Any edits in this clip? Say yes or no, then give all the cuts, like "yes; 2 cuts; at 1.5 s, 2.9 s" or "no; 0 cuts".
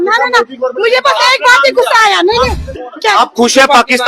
yes; 1 cut; at 2.7 s